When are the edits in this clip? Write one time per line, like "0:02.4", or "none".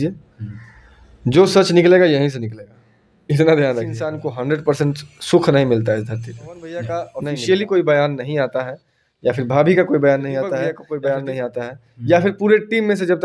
0:04.3
0:07.0
0:10.8